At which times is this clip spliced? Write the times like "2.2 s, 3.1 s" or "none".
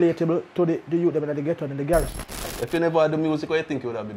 2.5 s